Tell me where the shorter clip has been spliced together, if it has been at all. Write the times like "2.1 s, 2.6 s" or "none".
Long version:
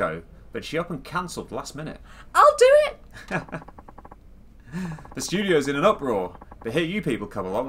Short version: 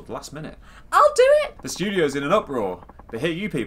1.6 s